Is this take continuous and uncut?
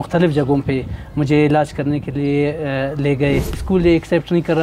no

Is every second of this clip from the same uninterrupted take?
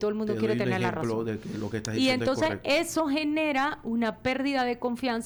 yes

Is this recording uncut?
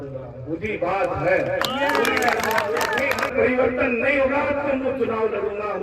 no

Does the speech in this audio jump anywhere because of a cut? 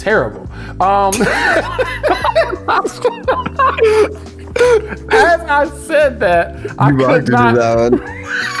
no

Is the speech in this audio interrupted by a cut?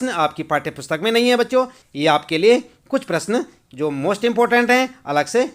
yes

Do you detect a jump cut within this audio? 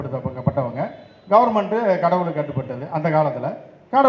no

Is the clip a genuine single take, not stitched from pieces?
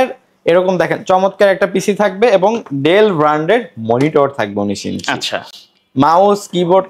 yes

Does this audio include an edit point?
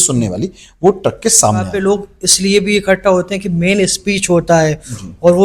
yes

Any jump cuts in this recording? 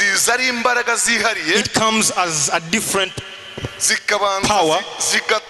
no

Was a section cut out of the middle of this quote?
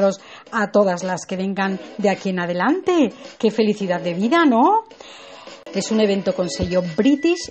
no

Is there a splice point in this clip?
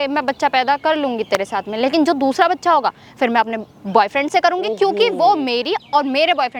no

